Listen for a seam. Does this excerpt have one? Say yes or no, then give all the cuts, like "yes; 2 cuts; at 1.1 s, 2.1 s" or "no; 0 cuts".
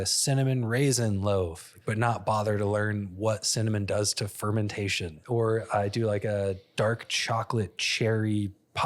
yes; 2 cuts; at 1.7 s, 5.1 s